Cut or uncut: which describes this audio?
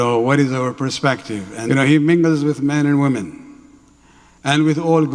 cut